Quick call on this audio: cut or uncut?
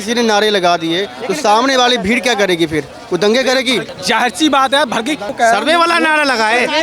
cut